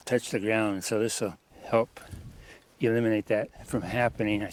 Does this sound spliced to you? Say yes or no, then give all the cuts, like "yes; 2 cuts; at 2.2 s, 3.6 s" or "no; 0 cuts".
no; 0 cuts